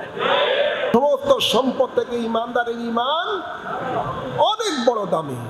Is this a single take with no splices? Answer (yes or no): no